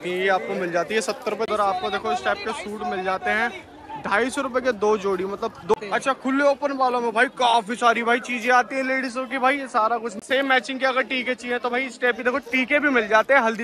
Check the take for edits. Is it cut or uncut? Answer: cut